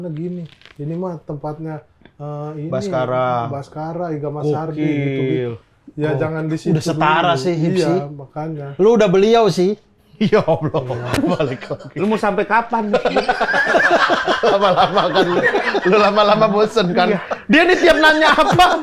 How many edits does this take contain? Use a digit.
0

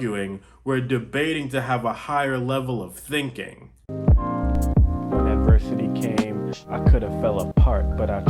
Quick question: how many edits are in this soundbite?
1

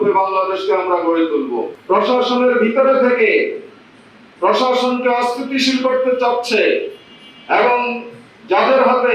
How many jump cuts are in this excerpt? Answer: 1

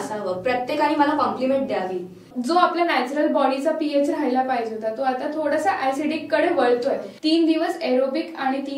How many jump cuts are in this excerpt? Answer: 2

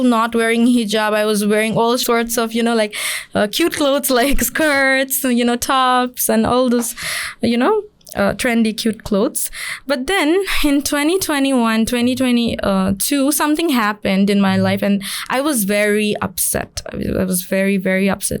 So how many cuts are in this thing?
1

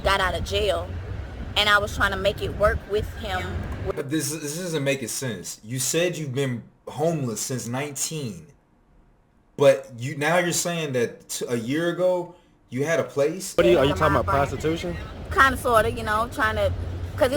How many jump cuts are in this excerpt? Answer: 1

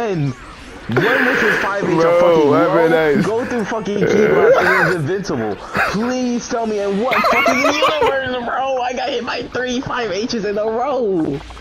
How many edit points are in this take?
0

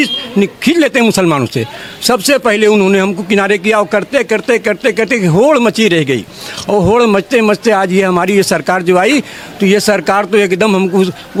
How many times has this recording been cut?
0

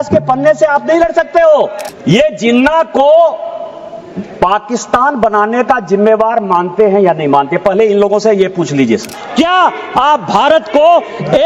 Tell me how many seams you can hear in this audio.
2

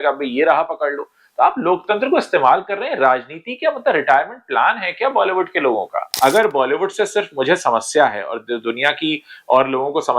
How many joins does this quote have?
1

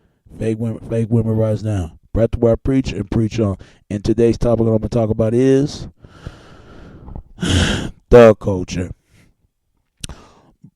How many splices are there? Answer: 1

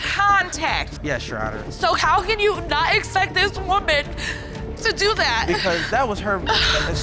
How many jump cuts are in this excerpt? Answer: 0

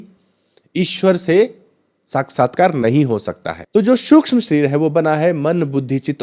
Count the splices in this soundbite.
1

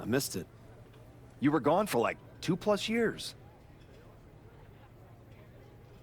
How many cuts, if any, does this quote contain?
1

